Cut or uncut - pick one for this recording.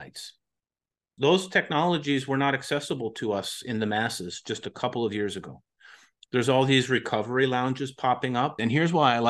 cut